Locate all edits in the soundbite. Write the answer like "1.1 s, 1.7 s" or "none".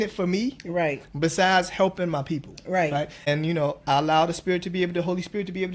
3.3 s